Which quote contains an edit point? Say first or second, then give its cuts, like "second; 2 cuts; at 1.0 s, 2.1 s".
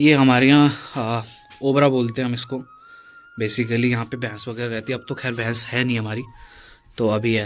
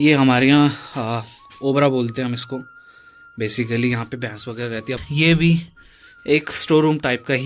second; 1 cut; at 5.0 s